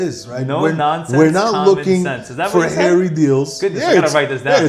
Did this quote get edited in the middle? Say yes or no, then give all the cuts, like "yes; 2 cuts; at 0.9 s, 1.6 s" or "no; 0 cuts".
no; 0 cuts